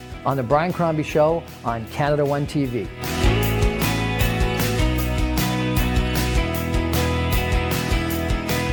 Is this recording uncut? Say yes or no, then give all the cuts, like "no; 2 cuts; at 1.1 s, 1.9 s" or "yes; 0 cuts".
yes; 0 cuts